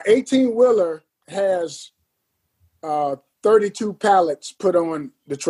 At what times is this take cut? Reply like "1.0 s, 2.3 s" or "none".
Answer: 1.1 s